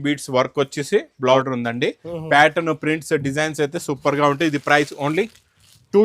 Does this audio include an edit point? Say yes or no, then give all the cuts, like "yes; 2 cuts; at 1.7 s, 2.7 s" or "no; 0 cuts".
yes; 1 cut; at 1.4 s